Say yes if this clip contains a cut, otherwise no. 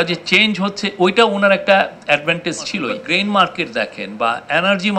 yes